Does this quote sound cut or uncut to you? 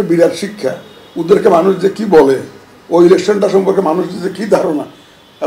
uncut